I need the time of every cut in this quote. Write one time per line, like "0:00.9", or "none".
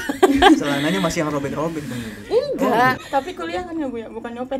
0:03.0